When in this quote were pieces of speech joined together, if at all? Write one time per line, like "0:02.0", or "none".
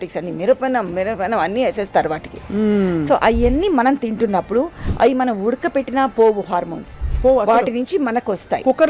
none